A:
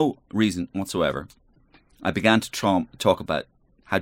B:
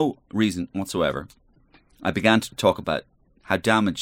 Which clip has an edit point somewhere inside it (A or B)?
B